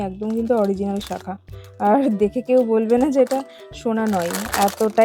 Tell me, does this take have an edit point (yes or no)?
no